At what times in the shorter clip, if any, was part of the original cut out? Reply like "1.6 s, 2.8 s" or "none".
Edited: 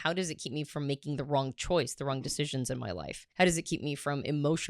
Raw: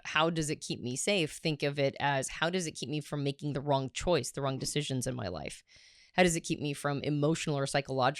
3.2 s